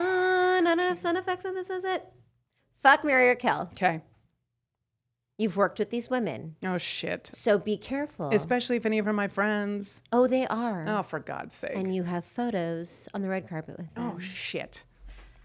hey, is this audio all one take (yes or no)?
yes